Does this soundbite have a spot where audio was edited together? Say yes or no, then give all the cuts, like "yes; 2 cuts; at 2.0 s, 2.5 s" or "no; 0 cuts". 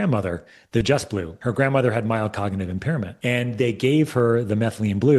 yes; 2 cuts; at 1.3 s, 3.1 s